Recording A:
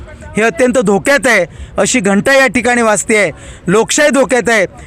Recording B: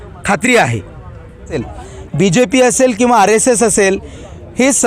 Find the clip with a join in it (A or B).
B